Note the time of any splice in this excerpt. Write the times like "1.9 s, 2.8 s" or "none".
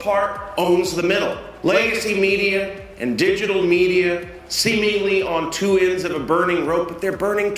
1.5 s

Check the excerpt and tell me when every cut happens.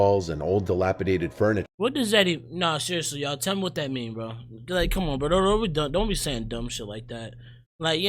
1.6 s

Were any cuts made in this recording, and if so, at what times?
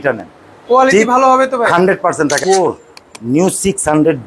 2.4 s

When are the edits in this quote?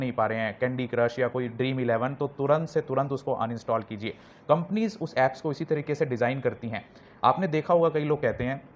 none

